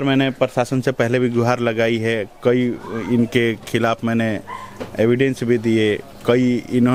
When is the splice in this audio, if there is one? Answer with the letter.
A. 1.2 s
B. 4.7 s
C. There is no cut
C